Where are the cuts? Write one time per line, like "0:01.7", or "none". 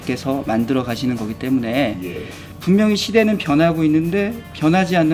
none